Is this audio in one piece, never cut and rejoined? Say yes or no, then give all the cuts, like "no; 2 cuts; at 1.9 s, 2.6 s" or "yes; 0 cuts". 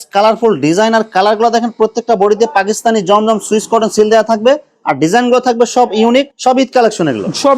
yes; 0 cuts